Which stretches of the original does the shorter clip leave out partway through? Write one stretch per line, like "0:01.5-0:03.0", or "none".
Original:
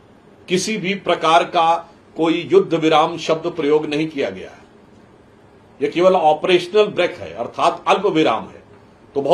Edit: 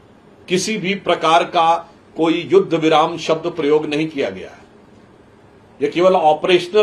none